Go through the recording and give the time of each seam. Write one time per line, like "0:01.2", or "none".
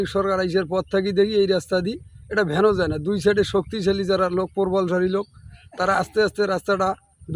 none